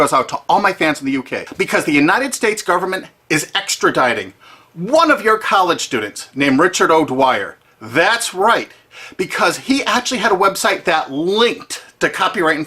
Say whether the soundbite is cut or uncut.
cut